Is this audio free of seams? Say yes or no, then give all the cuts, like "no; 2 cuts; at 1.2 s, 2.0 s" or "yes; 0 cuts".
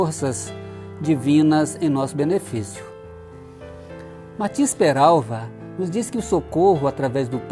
no; 1 cut; at 2.7 s